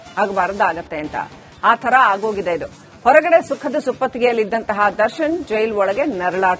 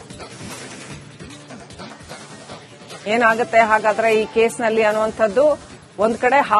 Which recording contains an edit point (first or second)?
second